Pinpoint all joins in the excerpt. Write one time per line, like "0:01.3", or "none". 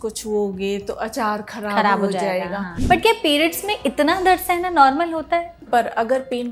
0:02.7
0:05.5